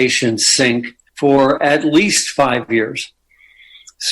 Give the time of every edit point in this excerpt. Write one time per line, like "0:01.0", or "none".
0:01.0